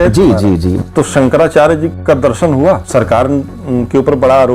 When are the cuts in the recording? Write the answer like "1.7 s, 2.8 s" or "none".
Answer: 0.8 s, 1.9 s, 2.8 s